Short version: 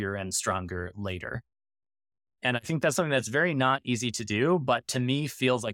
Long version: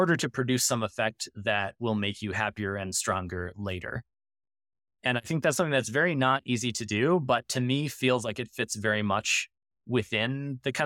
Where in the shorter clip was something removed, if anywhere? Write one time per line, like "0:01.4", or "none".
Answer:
none